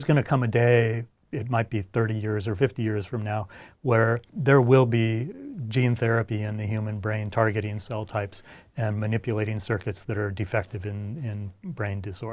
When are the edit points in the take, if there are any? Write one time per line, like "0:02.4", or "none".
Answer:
0:04.3